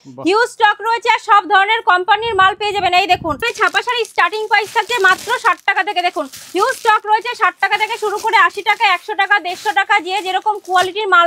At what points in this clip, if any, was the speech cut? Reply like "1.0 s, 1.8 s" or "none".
3.5 s

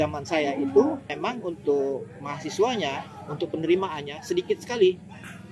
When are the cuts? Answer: 1.1 s

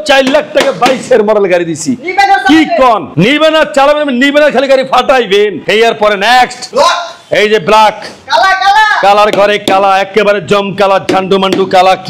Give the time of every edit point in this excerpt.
none

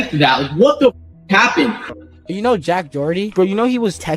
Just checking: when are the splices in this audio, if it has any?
1.9 s

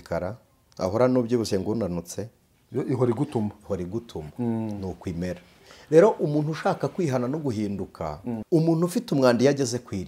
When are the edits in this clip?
8.4 s

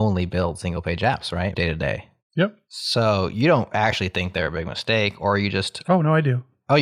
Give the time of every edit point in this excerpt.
1.5 s

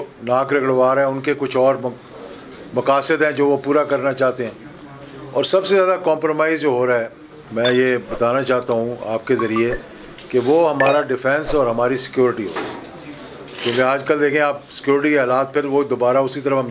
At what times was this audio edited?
none

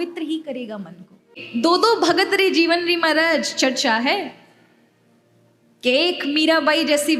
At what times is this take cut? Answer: 1.4 s

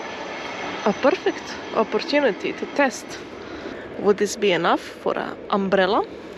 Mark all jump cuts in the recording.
3.8 s

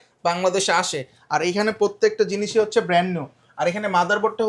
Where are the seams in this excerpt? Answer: none

